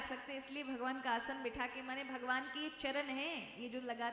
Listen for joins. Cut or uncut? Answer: uncut